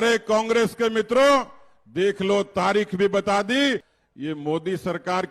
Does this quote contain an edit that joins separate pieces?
yes; 1 cut; at 3.9 s

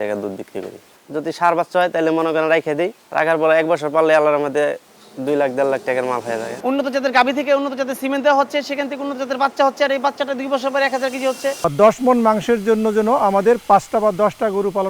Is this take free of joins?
no; 4 cuts; at 0.8 s, 3.0 s, 6.5 s, 11.6 s

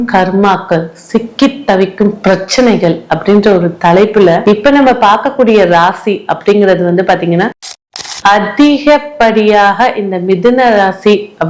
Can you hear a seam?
yes; 1 cut; at 7.5 s

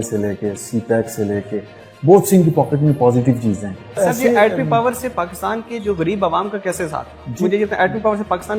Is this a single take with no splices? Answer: no; 1 cut; at 4.0 s

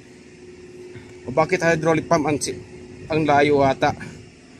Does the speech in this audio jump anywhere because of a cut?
no; 0 cuts

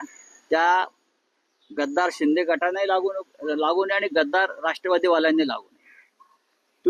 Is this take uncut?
yes; 0 cuts

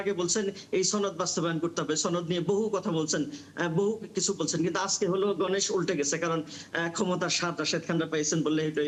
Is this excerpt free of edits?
yes; 0 cuts

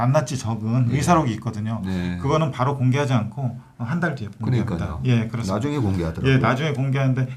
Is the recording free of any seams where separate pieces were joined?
yes; 0 cuts

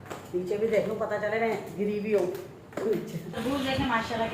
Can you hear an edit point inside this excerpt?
yes; 1 cut; at 3.3 s

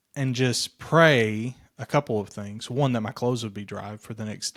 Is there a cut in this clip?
no; 0 cuts

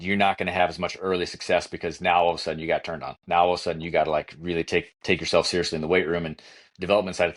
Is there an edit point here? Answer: no; 0 cuts

